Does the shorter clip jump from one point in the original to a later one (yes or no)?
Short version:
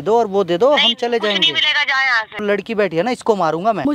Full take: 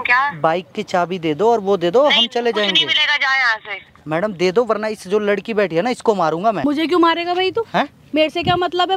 yes